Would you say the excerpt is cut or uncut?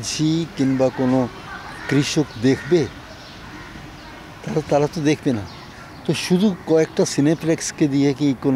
uncut